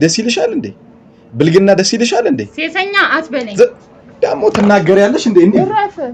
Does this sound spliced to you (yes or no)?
no